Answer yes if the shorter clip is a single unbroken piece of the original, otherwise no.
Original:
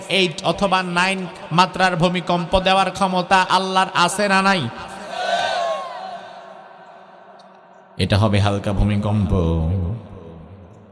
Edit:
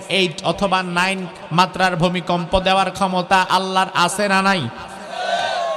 yes